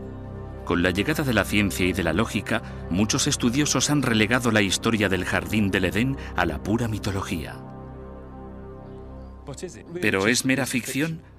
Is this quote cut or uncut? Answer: uncut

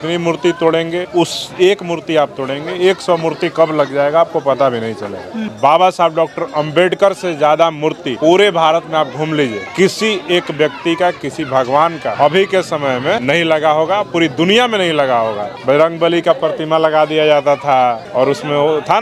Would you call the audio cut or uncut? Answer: cut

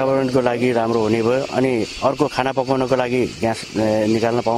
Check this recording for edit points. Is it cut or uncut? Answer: uncut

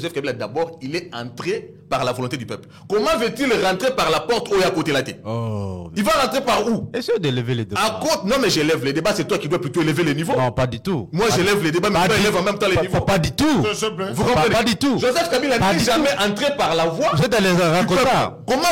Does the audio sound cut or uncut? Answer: uncut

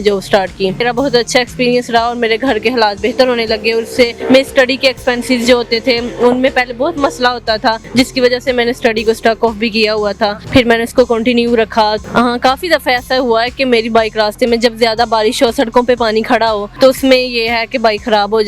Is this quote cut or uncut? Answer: cut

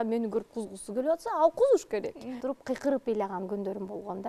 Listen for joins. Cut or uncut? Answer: cut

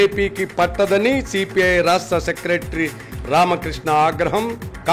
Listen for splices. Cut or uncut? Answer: uncut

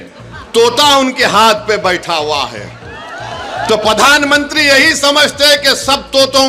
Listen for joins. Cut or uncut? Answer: uncut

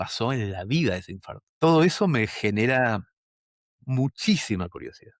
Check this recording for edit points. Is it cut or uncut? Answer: cut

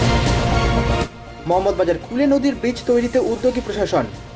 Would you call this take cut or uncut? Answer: uncut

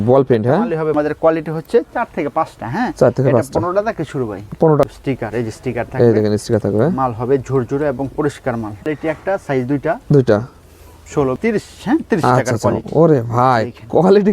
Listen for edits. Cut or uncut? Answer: cut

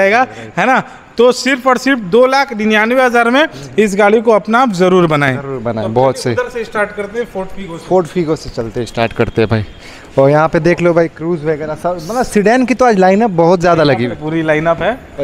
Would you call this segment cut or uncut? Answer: uncut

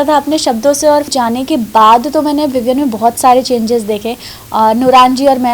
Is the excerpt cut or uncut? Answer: cut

